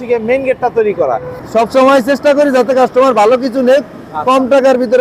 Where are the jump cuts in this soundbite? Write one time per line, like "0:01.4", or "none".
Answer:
0:01.4